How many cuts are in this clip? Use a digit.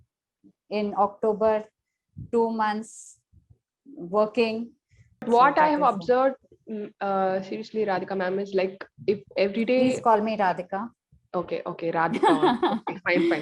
1